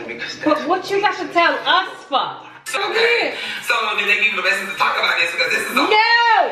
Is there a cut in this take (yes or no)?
yes